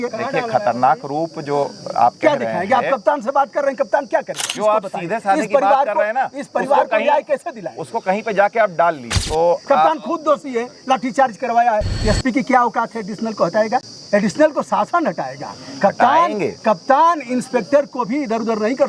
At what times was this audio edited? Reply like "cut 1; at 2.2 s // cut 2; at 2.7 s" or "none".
cut 1; at 4.5 s // cut 2; at 9.1 s // cut 3; at 11.9 s // cut 4; at 13.9 s

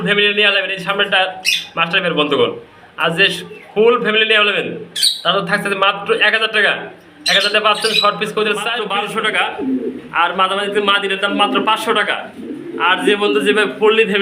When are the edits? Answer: cut 1; at 8.8 s

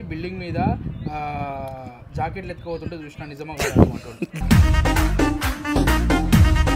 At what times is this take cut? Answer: cut 1; at 4.6 s

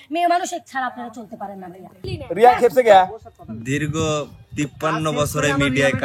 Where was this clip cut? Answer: cut 1; at 2.0 s

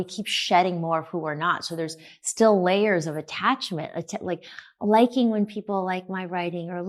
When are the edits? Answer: none

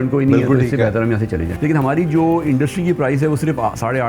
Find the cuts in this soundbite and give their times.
cut 1; at 1.5 s

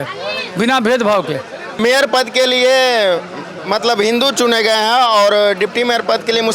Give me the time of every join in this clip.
cut 1; at 1.8 s

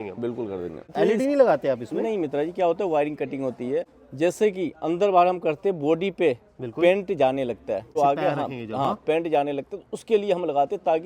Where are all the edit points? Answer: cut 1; at 0.9 s // cut 2; at 4.0 s // cut 3; at 7.9 s

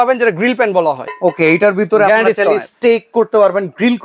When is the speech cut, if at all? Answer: none

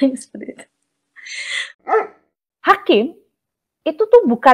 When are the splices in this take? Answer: cut 1; at 2.0 s

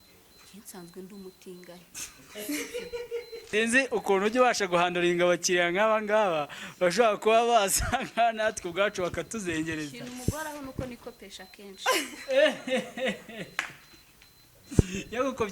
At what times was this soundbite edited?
cut 1; at 3.5 s

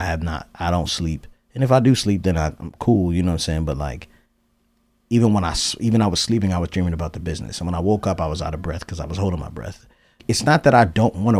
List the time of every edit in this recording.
cut 1; at 10.2 s

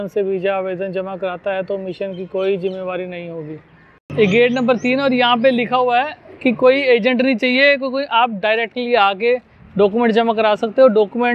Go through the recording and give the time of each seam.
none

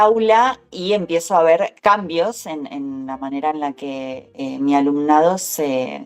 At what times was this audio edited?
cut 1; at 1.7 s // cut 2; at 4.2 s

